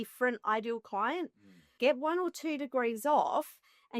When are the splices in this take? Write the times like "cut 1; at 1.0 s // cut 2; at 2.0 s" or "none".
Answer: cut 1; at 1.7 s